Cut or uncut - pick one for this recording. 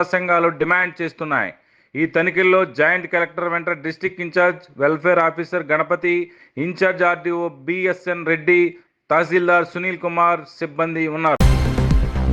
cut